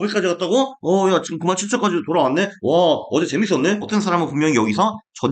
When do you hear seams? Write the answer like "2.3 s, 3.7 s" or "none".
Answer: 3.9 s